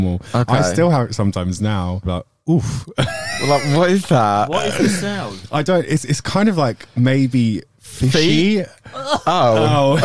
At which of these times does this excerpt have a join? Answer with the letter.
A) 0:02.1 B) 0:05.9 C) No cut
A